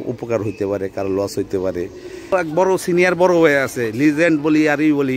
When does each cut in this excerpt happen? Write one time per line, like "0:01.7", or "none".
0:02.3